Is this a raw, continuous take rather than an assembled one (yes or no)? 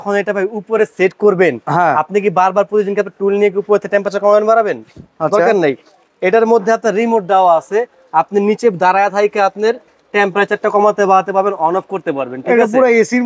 yes